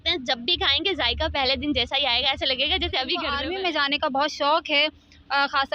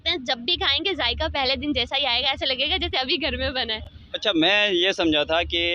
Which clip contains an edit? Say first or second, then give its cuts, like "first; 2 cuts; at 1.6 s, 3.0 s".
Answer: first; 1 cut; at 3.4 s